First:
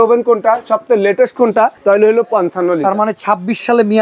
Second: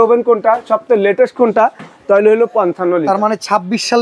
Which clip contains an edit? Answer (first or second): first